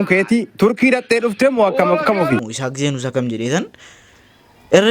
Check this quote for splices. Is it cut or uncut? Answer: cut